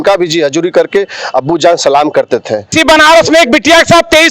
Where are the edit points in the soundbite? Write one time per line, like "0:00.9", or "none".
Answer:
0:02.7